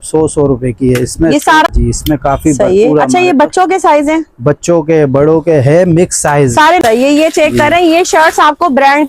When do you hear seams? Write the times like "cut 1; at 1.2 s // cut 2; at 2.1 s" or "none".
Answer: cut 1; at 1.7 s // cut 2; at 6.8 s